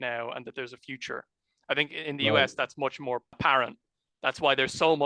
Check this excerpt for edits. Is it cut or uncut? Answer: cut